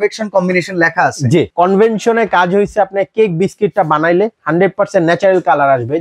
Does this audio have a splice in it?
yes; 1 cut; at 1.5 s

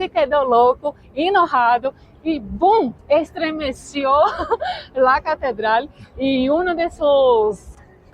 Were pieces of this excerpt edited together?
yes; 1 cut; at 3.0 s

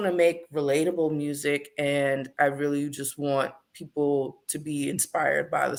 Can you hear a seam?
no; 0 cuts

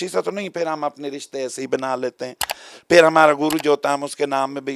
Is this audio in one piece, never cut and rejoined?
yes; 0 cuts

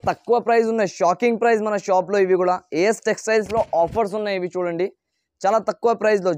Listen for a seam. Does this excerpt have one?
no; 0 cuts

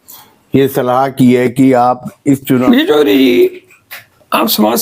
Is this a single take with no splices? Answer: no; 1 cut; at 2.6 s

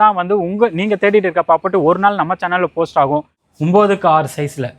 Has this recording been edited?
yes; 1 cut; at 3.4 s

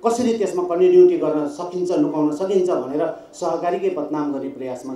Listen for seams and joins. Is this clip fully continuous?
yes; 0 cuts

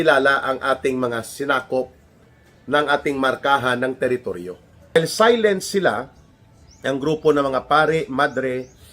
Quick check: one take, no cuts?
no; 1 cut; at 5.0 s

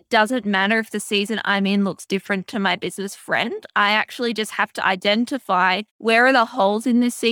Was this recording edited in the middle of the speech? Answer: yes; 1 cut; at 5.9 s

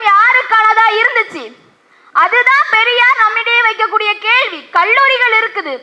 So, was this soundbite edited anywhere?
no; 0 cuts

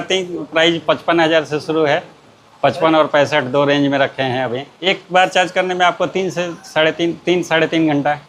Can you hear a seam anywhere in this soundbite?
yes; 1 cut; at 4.7 s

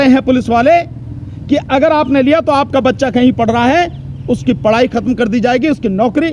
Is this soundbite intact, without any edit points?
yes; 0 cuts

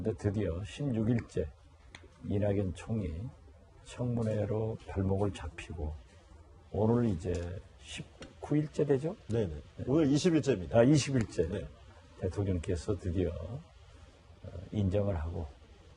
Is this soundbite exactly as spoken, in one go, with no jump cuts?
yes; 0 cuts

